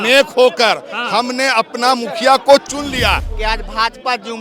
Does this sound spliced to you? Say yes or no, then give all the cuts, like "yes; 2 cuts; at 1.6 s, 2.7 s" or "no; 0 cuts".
yes; 1 cut; at 3.3 s